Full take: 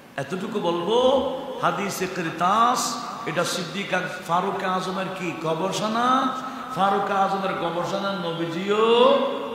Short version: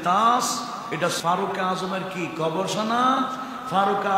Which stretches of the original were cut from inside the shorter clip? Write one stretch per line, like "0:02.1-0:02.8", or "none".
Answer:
0:03.5-0:04.2

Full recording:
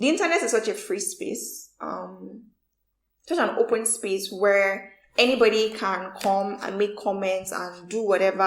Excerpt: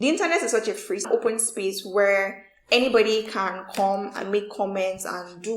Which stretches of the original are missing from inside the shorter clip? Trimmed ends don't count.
0:01.1-0:03.5

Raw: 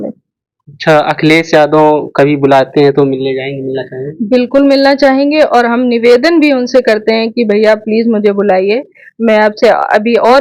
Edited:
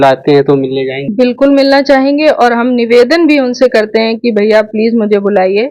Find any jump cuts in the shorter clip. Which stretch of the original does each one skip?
0:03.5-0:04.2

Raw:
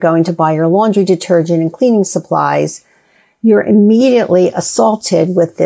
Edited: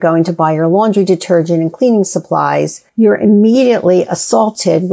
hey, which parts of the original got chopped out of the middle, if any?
0:02.8-0:03.3

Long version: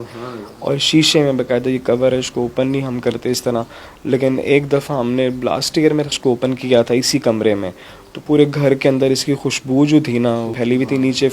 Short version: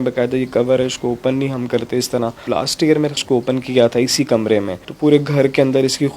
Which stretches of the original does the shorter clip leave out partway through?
0:03.8-0:05.4
0:07.8-0:08.1

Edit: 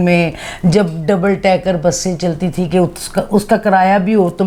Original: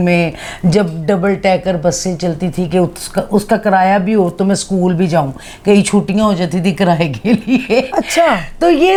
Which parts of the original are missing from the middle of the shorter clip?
none

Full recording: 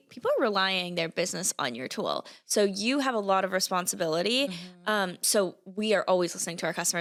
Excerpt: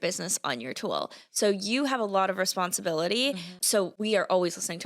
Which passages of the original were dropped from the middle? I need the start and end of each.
0:04.9-0:05.5

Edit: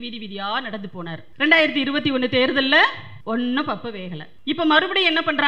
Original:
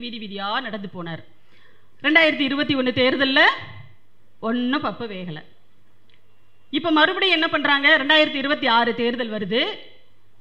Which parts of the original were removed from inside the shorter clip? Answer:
0:01.2-0:01.9
0:03.7-0:04.2
0:05.4-0:06.5

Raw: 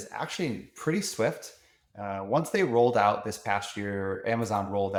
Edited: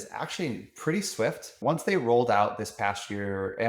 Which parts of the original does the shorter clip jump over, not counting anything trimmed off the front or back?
0:01.5-0:02.2

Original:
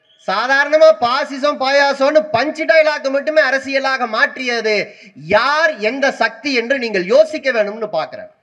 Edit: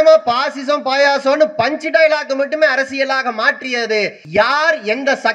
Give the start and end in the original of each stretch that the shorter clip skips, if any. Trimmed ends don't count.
0:04.9-0:05.1

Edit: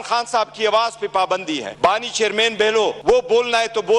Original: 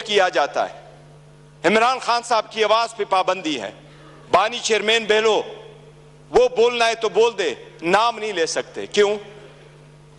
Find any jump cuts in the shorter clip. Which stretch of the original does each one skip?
0:03.6-0:04.2
0:05.5-0:06.2

